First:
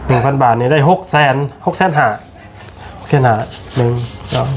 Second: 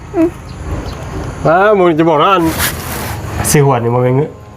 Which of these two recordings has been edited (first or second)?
second